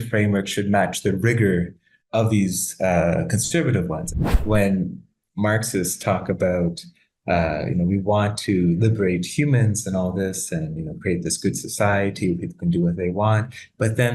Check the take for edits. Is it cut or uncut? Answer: cut